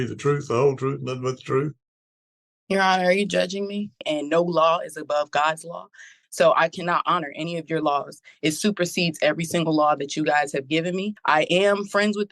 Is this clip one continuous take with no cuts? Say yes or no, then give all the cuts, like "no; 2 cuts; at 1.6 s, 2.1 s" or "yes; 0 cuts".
no; 2 cuts; at 4.0 s, 11.1 s